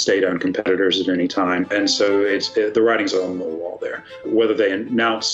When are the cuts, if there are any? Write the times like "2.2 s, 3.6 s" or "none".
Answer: 1.7 s, 4.2 s

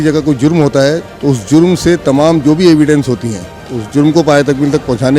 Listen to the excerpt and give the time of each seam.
1.1 s

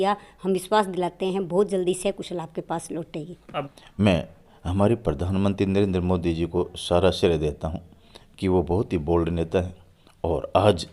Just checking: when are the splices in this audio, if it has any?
3.5 s

